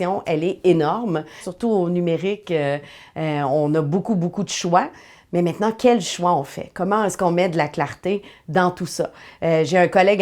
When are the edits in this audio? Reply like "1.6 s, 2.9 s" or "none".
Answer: 1.4 s